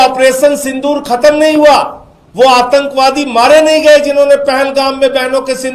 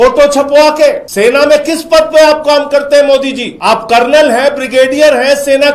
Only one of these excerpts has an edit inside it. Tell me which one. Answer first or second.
second